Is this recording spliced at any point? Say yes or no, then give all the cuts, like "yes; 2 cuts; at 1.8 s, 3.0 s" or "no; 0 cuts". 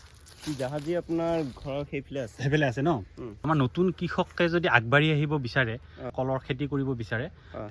yes; 2 cuts; at 3.4 s, 6.1 s